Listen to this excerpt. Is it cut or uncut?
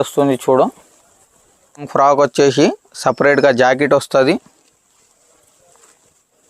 cut